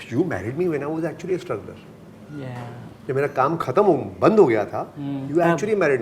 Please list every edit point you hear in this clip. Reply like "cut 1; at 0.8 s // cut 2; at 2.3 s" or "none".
none